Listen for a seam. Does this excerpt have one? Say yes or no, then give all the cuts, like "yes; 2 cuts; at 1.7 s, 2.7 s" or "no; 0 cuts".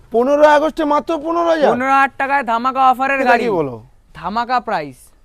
yes; 1 cut; at 3.4 s